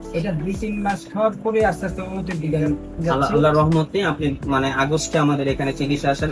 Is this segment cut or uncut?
uncut